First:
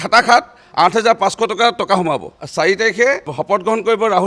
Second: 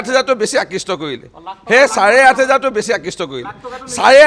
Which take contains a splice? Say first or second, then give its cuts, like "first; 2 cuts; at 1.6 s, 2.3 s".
first; 2 cuts; at 2.4 s, 3.3 s